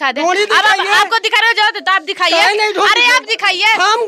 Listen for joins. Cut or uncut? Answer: uncut